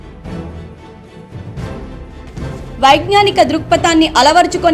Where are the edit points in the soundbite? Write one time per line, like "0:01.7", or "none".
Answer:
0:02.1